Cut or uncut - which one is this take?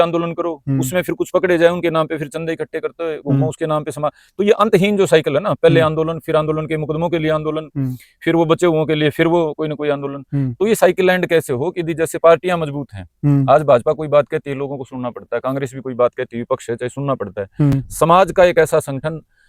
uncut